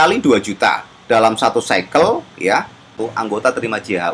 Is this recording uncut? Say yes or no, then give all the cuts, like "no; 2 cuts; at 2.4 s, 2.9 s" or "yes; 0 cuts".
no; 1 cut; at 3.0 s